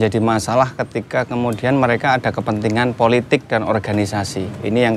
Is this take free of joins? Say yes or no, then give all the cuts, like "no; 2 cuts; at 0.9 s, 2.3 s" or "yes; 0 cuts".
yes; 0 cuts